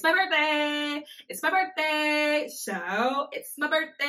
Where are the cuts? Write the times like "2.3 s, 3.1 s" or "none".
none